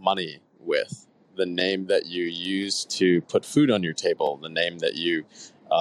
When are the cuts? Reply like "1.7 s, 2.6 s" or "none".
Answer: none